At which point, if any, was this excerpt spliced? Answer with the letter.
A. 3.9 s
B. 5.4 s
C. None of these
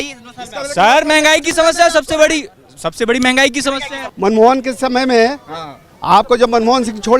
A